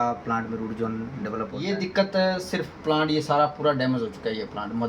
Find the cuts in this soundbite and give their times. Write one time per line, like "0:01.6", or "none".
0:01.6